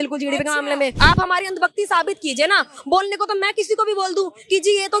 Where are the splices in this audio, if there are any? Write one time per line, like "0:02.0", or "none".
0:00.9